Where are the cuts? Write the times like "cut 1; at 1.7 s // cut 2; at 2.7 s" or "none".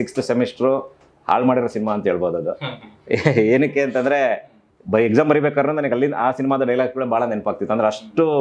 none